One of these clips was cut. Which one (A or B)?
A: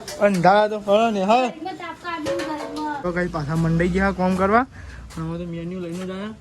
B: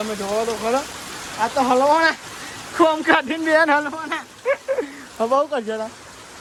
A